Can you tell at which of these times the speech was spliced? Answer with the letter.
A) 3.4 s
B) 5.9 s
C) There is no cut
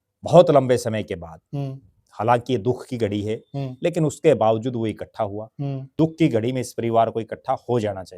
B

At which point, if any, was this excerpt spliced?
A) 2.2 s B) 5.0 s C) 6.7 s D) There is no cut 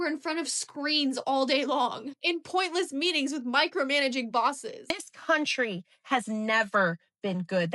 B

